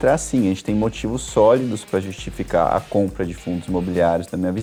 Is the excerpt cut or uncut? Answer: uncut